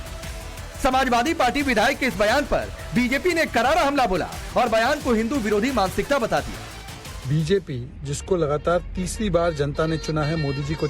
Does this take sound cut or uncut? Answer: cut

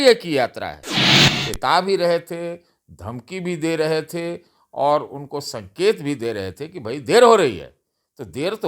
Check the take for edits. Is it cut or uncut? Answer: cut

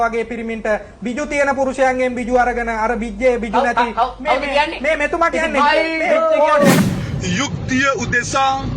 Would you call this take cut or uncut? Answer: cut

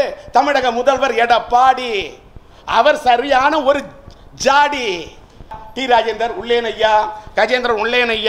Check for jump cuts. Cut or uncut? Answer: cut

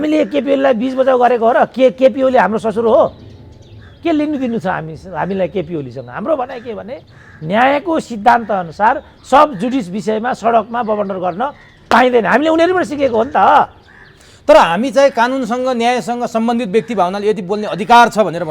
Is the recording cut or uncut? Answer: uncut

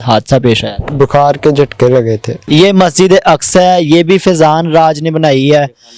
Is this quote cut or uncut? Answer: cut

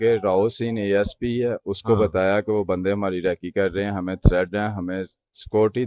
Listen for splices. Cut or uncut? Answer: uncut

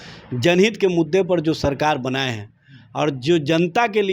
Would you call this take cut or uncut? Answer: uncut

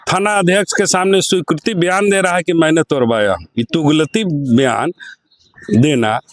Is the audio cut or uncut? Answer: uncut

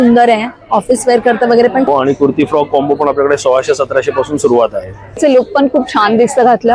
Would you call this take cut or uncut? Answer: cut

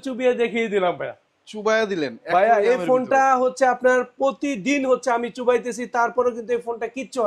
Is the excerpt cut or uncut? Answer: uncut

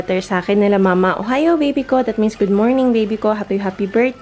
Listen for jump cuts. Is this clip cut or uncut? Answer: uncut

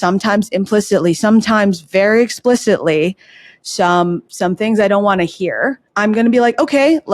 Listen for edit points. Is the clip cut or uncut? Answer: cut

